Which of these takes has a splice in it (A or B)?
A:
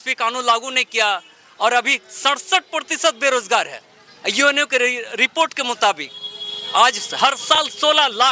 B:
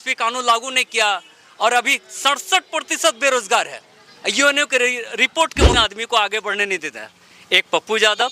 B